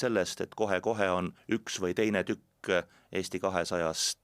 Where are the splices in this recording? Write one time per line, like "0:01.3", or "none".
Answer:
0:01.4